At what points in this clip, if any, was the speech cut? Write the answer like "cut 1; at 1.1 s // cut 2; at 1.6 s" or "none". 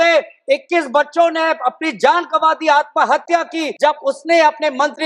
cut 1; at 3.7 s